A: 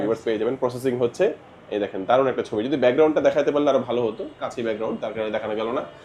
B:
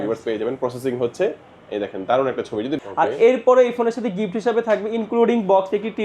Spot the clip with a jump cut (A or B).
B